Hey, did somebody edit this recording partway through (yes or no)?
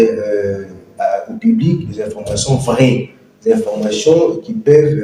no